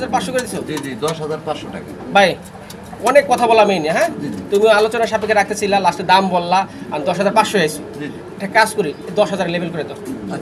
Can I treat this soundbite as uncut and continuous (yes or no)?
yes